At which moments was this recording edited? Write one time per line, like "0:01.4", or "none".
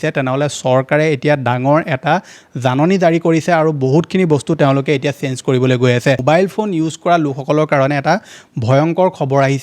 0:06.2